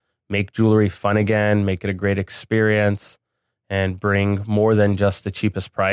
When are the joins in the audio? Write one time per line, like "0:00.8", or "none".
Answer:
none